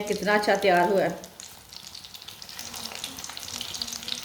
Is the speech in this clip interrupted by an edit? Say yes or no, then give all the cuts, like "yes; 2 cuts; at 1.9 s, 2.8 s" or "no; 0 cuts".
no; 0 cuts